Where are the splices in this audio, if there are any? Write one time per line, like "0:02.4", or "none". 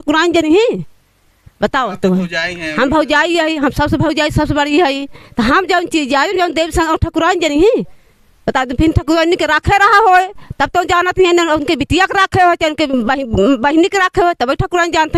none